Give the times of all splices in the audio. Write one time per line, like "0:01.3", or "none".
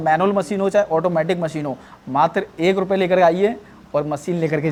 none